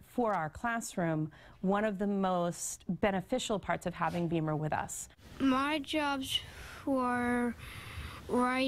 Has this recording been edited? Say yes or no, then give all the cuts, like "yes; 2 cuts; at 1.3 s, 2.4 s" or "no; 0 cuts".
yes; 1 cut; at 2.2 s